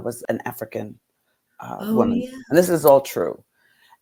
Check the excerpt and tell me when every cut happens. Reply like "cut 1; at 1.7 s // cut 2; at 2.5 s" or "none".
none